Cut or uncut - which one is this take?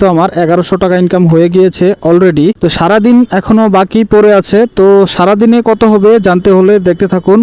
cut